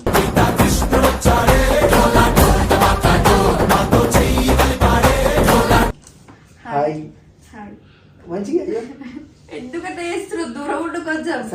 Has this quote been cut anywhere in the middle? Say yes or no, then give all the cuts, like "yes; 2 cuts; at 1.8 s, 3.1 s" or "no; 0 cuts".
no; 0 cuts